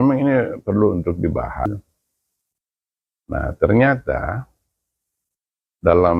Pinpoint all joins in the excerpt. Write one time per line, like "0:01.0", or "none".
0:01.7

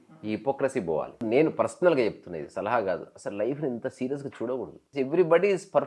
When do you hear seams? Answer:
0:01.2
0:04.8

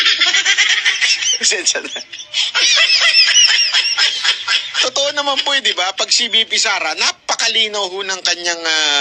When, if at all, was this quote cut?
0:01.1

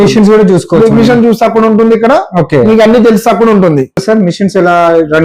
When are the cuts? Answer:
0:04.0

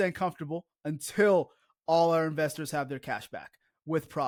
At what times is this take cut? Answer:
none

